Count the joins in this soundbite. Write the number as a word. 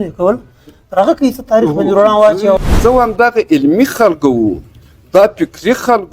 one